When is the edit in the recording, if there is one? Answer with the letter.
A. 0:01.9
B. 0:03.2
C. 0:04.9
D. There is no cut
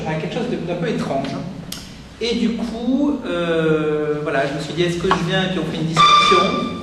C